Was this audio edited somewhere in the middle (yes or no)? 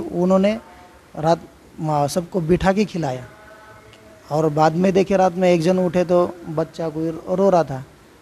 no